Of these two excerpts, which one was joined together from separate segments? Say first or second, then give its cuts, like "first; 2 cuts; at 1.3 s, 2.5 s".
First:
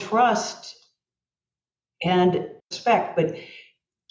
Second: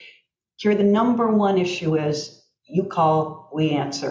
first; 1 cut; at 2.5 s